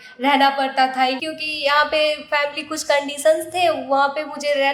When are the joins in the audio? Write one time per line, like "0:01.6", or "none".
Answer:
0:01.2